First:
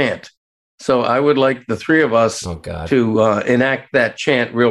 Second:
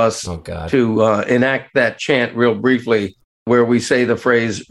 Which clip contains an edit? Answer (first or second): second